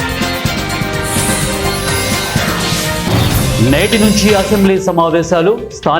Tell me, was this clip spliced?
no; 0 cuts

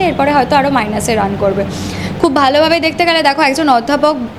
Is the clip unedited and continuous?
yes; 0 cuts

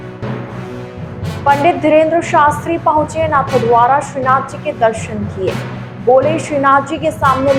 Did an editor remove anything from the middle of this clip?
no; 0 cuts

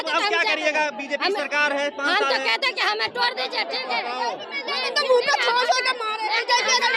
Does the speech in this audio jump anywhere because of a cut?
no; 0 cuts

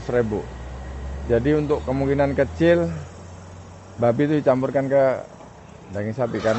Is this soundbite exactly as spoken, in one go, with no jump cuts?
yes; 0 cuts

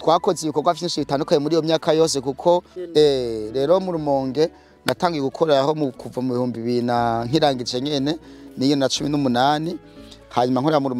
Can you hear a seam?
yes; 1 cut; at 2.8 s

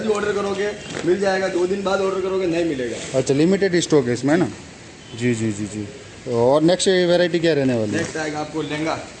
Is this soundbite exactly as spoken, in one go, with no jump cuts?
yes; 0 cuts

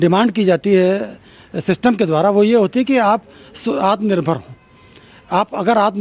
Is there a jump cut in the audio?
no; 0 cuts

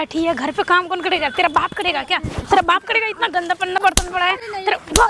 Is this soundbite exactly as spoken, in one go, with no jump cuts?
yes; 0 cuts

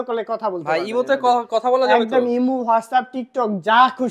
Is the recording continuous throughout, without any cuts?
yes; 0 cuts

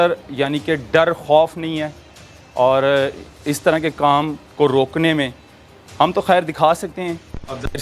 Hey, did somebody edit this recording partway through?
no; 0 cuts

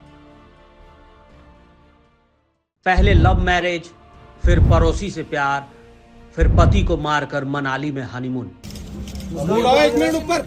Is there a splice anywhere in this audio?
no; 0 cuts

